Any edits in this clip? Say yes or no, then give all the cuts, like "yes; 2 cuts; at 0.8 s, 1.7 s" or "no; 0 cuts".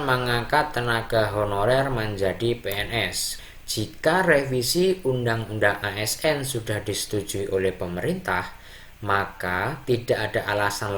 yes; 1 cut; at 3.3 s